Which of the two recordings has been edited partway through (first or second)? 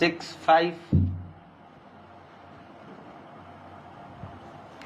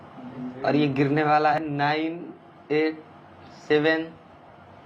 second